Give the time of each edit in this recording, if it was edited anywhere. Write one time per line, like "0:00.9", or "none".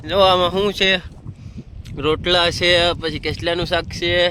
none